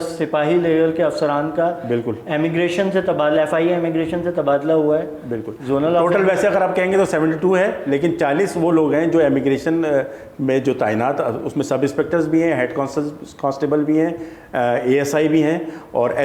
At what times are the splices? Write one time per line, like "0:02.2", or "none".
none